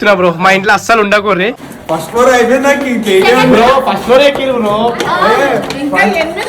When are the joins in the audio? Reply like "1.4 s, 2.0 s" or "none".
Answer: 1.7 s